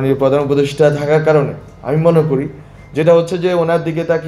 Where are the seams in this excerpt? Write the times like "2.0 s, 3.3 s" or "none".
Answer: none

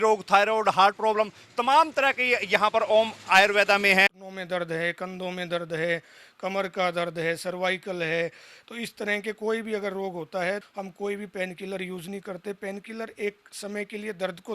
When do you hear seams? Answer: 4.1 s, 10.6 s

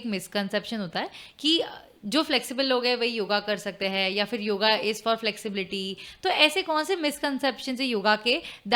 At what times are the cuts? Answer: none

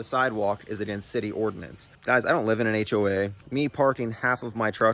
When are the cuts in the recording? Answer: 1.9 s, 3.4 s

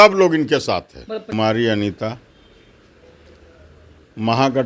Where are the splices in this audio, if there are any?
1.3 s

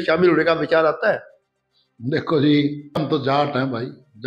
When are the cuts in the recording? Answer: 3.0 s

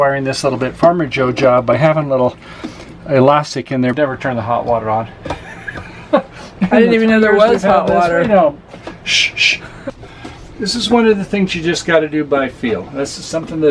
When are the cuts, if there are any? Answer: 3.9 s, 9.8 s

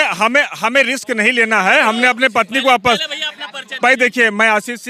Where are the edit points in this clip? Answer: none

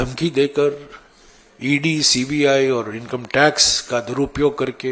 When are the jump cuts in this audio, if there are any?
none

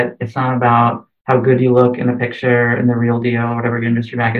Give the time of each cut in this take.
none

